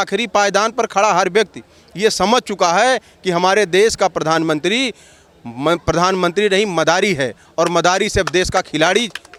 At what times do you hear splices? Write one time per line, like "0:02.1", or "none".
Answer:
none